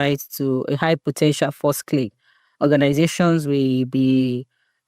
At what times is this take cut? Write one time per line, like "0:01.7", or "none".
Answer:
none